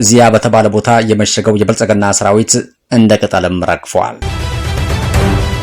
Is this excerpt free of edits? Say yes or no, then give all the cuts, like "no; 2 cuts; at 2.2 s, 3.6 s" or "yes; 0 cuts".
no; 1 cut; at 4.2 s